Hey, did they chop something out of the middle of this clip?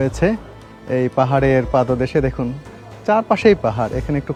no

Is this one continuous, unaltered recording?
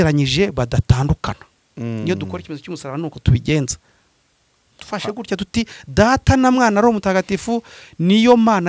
yes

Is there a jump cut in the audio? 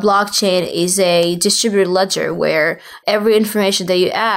yes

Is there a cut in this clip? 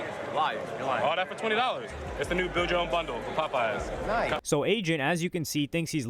yes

